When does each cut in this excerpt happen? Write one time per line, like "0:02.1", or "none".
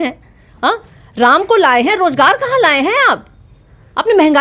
none